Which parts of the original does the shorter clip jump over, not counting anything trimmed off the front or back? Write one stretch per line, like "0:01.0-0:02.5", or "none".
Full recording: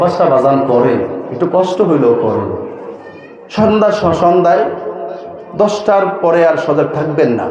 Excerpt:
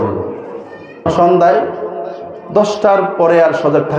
0:03.4-0:04.1